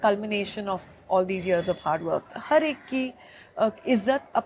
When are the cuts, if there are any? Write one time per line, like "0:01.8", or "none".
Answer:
0:02.3